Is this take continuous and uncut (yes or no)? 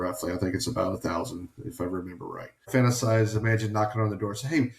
no